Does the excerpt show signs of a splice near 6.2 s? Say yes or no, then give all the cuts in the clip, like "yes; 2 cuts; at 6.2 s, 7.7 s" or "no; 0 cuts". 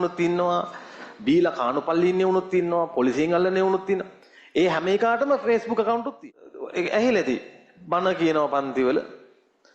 yes; 1 cut; at 6.2 s